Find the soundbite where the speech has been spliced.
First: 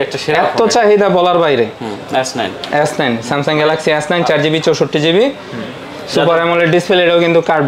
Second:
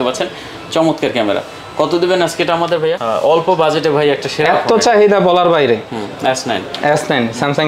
second; 1 cut; at 3.0 s

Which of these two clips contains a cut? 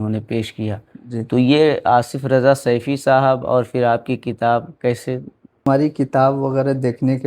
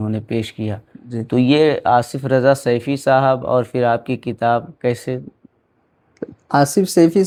first; 1 cut; at 5.7 s

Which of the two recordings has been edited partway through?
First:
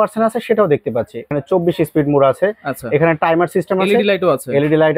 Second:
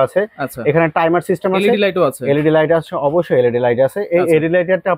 first; 1 cut; at 1.2 s

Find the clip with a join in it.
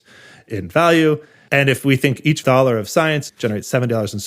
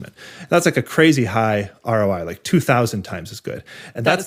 first; 2 cuts; at 1.3 s, 3.3 s

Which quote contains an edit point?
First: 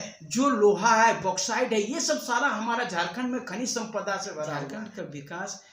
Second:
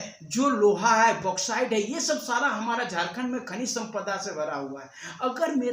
first; 1 cut; at 4.7 s

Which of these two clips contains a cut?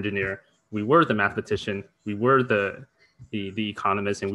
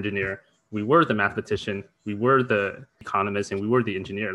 second; 1 cut; at 3.0 s

